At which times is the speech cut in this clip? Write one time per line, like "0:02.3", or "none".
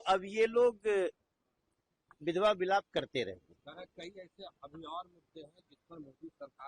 none